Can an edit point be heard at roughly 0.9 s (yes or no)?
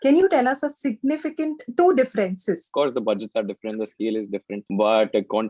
no